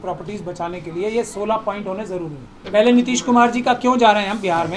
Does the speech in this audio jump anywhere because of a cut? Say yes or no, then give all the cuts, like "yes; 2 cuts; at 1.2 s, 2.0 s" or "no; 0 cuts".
yes; 1 cut; at 2.5 s